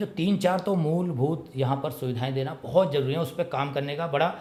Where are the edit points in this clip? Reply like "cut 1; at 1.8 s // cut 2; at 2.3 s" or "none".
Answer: none

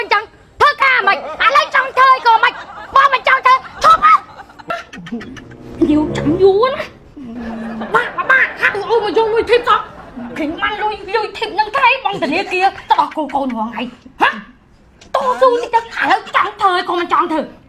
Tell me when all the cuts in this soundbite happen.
cut 1; at 4.7 s

